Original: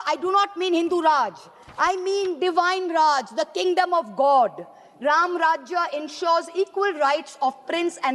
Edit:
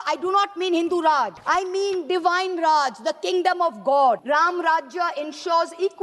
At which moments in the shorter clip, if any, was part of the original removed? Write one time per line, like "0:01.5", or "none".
0:01.4
0:04.2